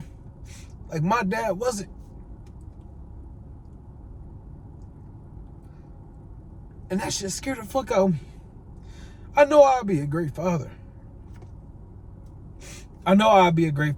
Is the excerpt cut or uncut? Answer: uncut